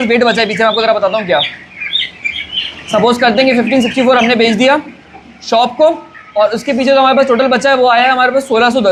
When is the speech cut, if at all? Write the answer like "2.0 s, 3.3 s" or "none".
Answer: none